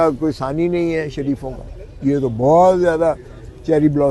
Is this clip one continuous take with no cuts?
yes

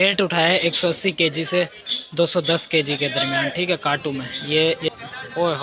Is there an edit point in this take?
yes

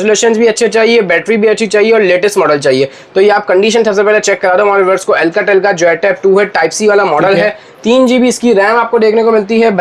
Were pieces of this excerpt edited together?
no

